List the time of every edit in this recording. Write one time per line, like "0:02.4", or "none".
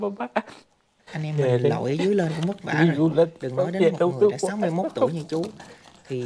0:01.1